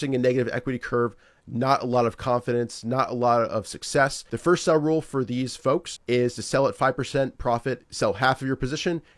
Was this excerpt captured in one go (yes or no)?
no